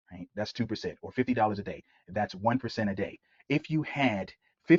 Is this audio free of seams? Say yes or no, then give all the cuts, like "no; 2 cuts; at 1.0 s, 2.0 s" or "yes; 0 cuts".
yes; 0 cuts